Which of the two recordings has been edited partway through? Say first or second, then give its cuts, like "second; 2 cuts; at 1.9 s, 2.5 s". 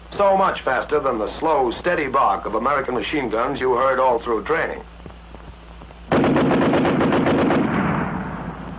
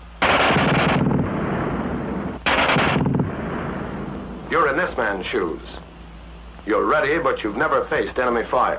second; 1 cut; at 5.5 s